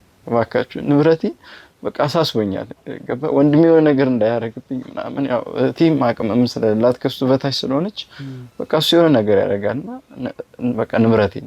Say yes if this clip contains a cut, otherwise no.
no